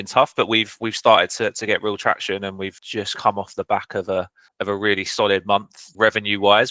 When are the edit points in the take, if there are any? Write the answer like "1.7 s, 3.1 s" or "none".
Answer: 2.7 s, 4.4 s, 5.8 s